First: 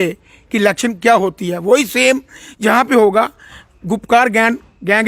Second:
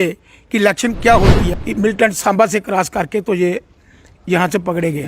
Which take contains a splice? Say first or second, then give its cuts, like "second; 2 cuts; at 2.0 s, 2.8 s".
second; 1 cut; at 1.5 s